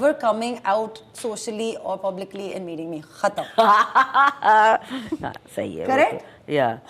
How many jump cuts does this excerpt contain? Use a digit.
0